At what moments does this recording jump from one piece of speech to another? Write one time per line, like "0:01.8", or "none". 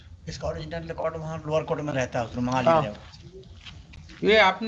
none